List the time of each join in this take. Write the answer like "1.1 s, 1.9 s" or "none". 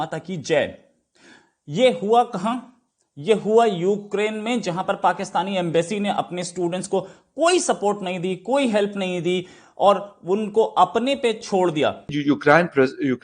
12.1 s